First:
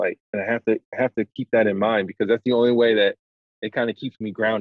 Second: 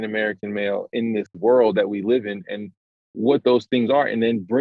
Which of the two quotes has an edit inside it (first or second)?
second